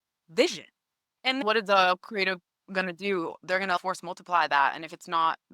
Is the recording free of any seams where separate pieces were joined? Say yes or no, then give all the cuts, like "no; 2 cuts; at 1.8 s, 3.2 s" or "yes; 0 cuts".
no; 2 cuts; at 1.4 s, 3.8 s